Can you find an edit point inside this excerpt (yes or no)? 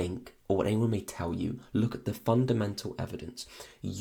no